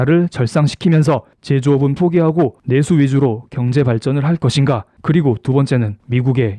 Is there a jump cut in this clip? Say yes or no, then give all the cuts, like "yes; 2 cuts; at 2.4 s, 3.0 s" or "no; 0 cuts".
yes; 1 cut; at 4.9 s